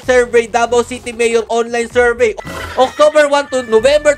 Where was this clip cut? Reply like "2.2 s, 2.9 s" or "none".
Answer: 2.3 s